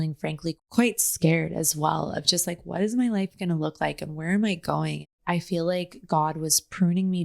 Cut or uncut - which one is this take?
cut